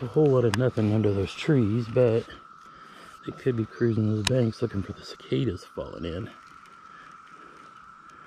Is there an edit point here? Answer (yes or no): no